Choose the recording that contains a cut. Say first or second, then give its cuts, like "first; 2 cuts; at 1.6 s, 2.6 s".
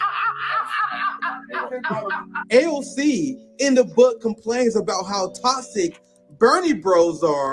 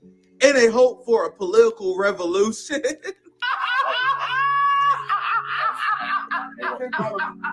first; 1 cut; at 3.5 s